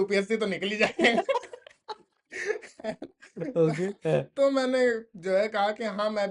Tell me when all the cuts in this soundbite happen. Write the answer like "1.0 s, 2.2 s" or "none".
none